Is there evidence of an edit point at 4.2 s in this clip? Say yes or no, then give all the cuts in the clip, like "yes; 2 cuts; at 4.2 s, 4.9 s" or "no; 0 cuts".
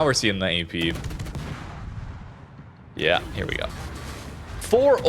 no; 1 cut; at 0.9 s